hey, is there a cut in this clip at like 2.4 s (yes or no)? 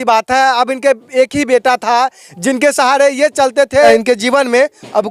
no